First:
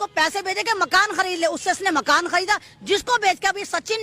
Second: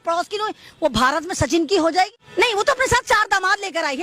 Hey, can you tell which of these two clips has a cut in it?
second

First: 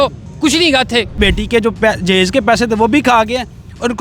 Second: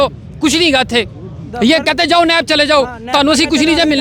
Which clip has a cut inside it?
first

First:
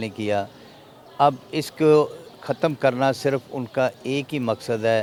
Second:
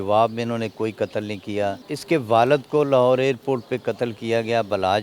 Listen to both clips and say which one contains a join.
second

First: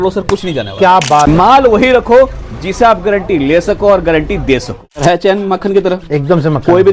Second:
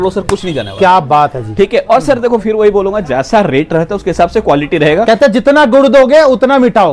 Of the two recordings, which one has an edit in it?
first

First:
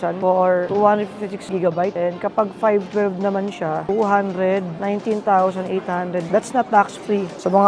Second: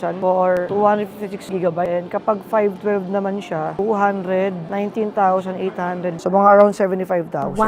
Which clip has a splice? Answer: second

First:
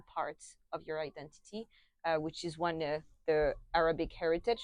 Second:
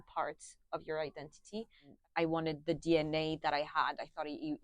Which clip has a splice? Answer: second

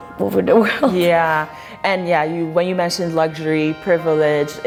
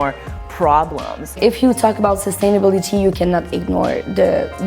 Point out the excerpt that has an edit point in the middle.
second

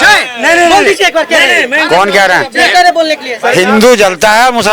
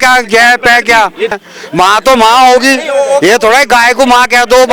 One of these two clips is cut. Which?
second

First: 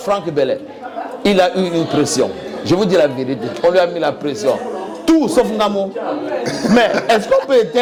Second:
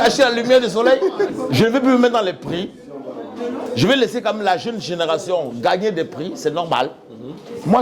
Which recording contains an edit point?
second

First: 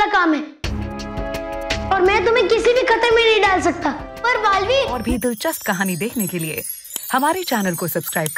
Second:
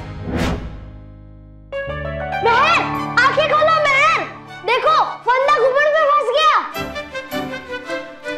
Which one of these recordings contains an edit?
first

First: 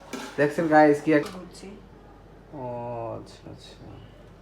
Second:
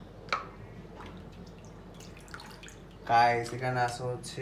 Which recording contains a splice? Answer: first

